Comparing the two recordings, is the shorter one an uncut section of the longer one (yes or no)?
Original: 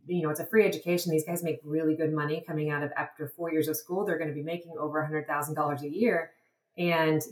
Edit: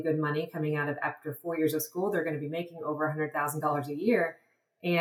yes